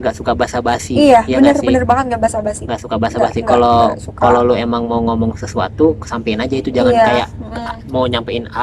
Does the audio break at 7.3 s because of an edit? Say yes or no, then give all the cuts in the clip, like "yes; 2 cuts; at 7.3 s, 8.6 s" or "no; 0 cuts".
no; 0 cuts